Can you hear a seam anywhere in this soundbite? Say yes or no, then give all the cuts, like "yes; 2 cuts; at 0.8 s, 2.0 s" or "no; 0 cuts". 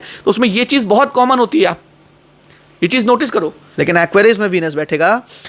yes; 1 cut; at 3.6 s